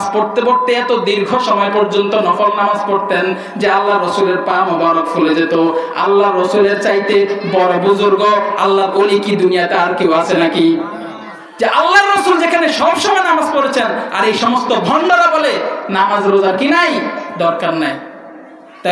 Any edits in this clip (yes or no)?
no